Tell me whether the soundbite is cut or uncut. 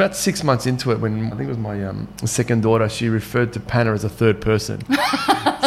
cut